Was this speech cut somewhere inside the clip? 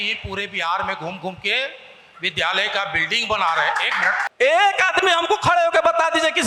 yes; 1 cut; at 4.2 s

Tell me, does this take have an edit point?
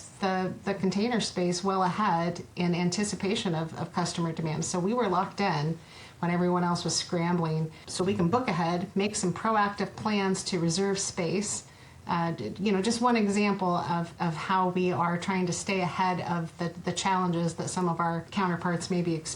yes; 2 cuts; at 7.8 s, 18.3 s

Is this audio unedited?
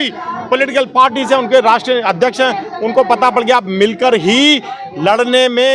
yes; 0 cuts

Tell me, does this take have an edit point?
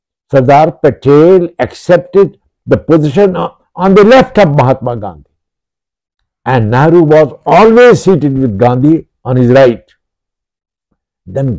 no; 0 cuts

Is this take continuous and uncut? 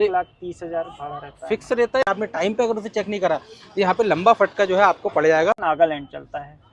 no; 2 cuts; at 2.0 s, 5.6 s

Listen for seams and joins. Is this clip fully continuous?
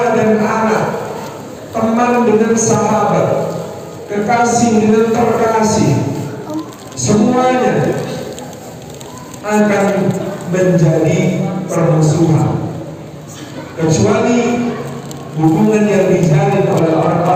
yes; 0 cuts

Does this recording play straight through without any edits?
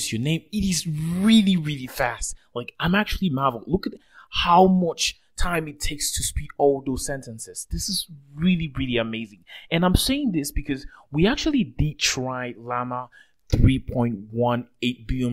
yes; 0 cuts

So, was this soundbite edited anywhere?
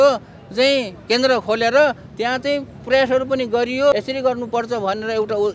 yes; 1 cut; at 3.9 s

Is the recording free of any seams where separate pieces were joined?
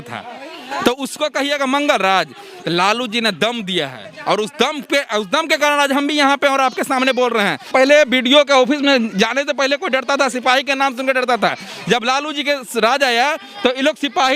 no; 1 cut; at 7.7 s

